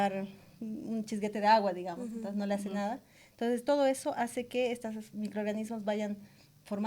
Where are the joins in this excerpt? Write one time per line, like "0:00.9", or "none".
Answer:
none